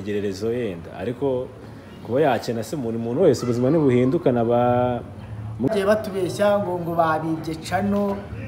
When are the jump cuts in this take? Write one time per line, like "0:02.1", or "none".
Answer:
0:05.7

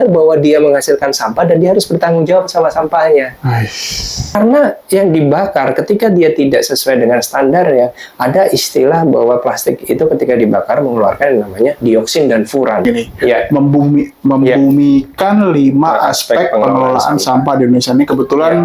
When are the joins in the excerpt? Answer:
0:04.3
0:12.8

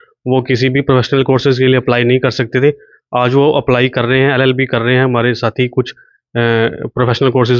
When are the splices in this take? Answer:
none

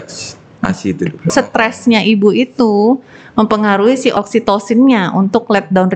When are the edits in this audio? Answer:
0:01.3
0:04.1

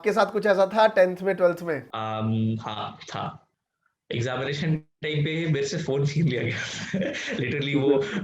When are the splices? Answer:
0:01.9
0:03.5

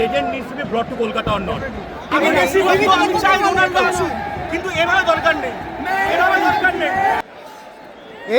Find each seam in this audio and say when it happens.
0:02.1
0:07.2

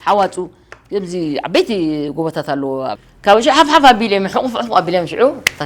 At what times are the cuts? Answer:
0:02.9

